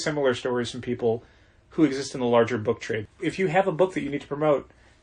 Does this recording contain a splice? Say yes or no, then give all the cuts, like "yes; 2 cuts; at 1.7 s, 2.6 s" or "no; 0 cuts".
yes; 1 cut; at 3.1 s